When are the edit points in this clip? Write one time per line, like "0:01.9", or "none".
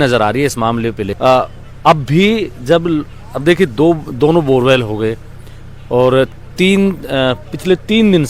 none